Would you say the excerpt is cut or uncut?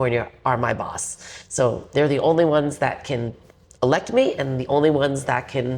uncut